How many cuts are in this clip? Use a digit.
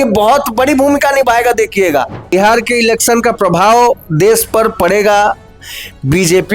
1